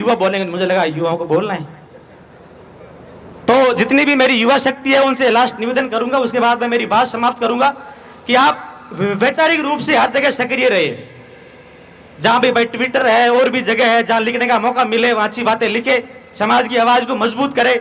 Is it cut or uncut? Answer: uncut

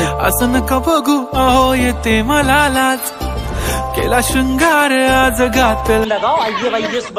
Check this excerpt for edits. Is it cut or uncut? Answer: cut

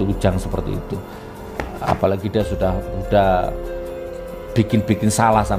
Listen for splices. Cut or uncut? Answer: uncut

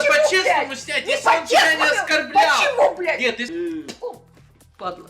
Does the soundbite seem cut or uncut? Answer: cut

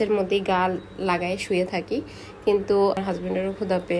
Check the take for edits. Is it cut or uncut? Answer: cut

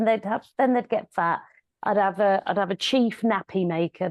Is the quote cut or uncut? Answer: uncut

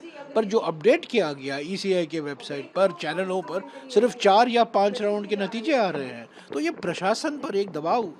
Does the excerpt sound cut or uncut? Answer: uncut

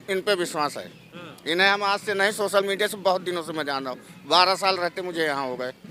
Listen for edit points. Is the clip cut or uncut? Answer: uncut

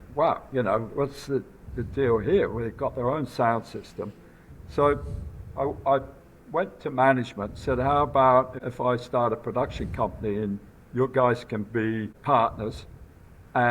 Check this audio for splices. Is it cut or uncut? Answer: cut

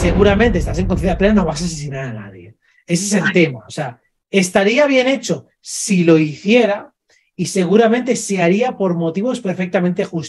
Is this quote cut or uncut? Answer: uncut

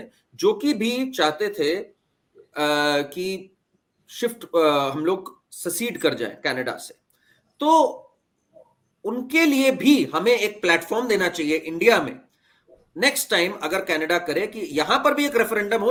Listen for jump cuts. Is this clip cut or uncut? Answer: uncut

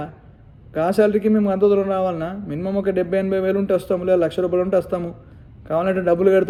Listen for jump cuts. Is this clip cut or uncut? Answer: uncut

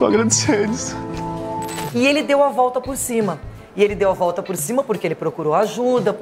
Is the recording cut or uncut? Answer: cut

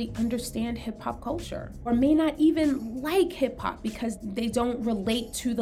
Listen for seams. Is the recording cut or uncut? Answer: cut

